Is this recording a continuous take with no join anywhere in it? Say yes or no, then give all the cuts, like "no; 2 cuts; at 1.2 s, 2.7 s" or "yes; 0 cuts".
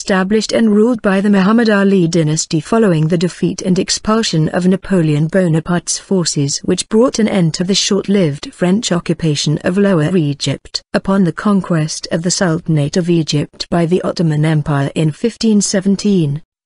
yes; 0 cuts